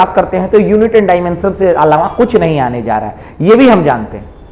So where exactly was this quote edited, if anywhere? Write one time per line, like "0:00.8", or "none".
none